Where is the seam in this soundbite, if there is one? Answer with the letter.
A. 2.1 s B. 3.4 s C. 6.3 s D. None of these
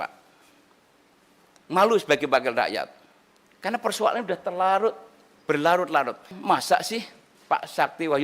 C